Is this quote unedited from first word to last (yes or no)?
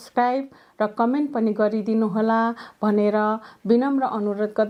yes